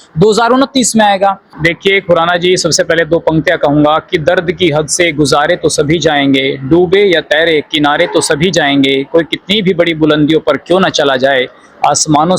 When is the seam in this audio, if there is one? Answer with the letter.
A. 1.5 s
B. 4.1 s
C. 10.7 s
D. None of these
A